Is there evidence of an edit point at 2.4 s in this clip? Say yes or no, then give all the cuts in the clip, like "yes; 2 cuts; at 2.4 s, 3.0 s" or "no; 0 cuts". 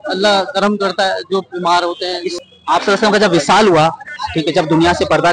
yes; 1 cut; at 2.4 s